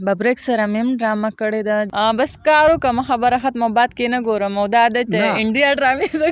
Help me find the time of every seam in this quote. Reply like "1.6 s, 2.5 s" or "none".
1.9 s